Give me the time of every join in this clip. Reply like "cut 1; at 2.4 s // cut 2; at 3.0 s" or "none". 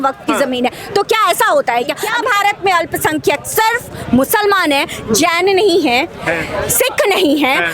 cut 1; at 2.1 s